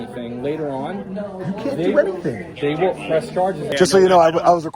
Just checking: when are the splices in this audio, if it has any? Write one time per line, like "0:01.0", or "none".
0:03.6